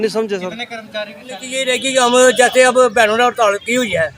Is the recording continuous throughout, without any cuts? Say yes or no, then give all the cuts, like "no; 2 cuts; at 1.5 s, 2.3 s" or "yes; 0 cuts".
no; 1 cut; at 1.5 s